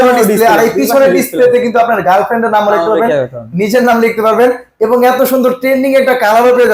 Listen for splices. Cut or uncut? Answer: uncut